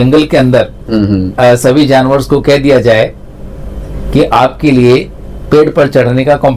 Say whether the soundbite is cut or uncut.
uncut